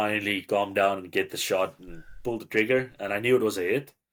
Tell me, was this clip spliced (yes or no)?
no